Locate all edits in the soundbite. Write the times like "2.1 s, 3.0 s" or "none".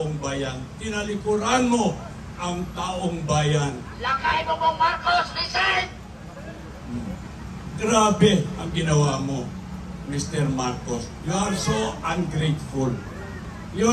none

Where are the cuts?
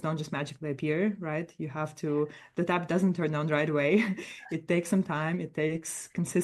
none

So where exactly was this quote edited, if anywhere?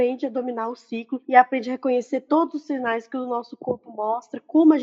1.2 s

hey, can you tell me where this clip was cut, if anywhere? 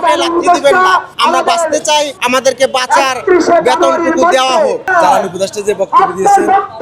1.1 s, 2.2 s, 4.9 s

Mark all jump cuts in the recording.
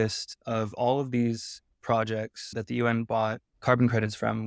2.5 s, 3.5 s

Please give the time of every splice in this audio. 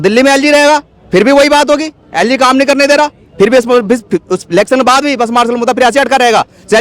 none

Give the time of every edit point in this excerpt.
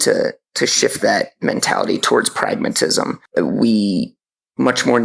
3.2 s

